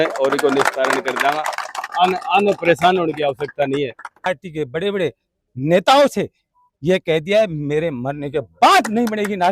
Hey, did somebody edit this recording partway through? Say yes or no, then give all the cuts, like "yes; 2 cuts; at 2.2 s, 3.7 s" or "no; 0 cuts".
yes; 1 cut; at 4.3 s